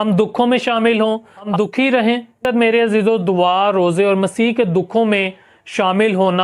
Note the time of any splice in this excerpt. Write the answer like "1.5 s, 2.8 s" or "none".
2.4 s